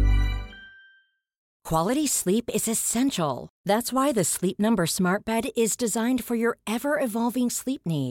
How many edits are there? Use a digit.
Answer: 1